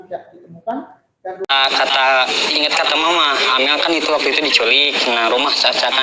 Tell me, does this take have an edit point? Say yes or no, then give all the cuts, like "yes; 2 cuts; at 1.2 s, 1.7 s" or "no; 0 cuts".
yes; 1 cut; at 1.5 s